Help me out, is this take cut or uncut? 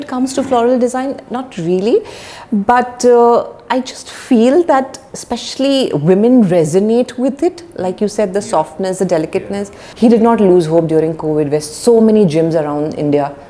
cut